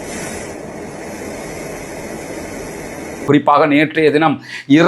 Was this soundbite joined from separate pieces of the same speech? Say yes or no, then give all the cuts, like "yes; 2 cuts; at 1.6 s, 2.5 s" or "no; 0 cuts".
no; 0 cuts